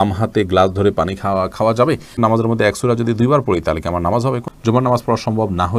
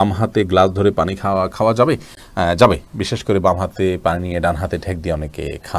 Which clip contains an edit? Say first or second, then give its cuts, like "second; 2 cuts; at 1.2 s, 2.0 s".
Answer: first; 2 cuts; at 2.1 s, 4.5 s